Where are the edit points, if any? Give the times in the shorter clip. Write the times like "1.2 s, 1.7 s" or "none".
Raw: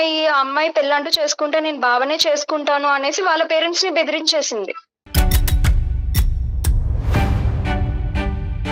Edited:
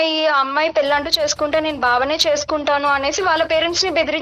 none